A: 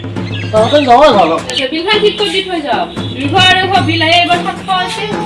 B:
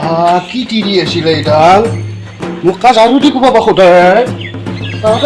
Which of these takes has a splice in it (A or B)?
A